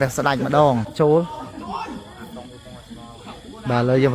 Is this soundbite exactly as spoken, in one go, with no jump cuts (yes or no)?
no